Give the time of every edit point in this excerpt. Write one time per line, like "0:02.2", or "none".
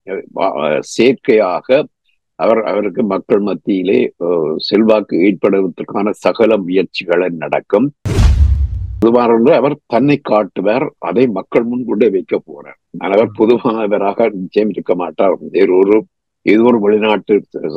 0:08.4